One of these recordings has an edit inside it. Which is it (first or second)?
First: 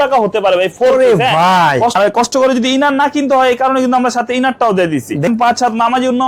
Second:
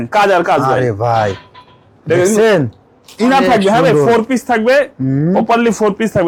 first